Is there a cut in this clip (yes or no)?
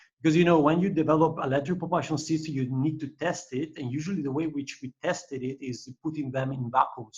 no